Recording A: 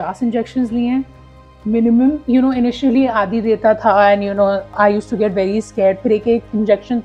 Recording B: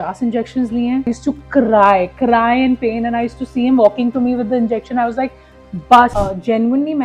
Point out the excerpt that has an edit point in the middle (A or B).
B